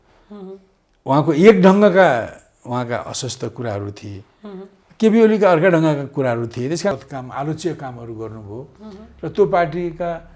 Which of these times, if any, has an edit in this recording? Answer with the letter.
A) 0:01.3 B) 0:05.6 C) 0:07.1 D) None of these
C